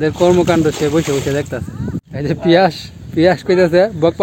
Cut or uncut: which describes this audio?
cut